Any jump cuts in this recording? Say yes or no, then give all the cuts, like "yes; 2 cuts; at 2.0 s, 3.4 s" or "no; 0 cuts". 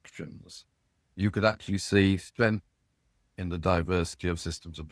yes; 1 cut; at 1.1 s